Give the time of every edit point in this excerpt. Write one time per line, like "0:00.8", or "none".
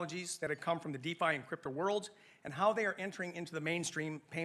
none